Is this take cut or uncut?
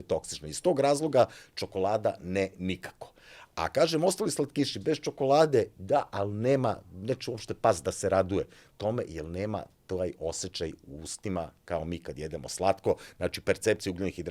uncut